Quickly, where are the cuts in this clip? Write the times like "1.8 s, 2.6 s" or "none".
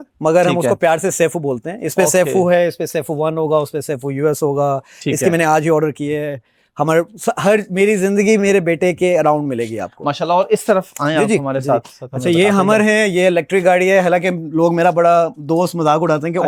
none